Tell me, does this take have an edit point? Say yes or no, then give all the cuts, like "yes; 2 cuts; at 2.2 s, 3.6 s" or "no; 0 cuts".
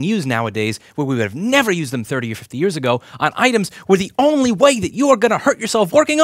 no; 0 cuts